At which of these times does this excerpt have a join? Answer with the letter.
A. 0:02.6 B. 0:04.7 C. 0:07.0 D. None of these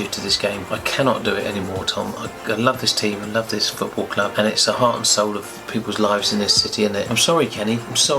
C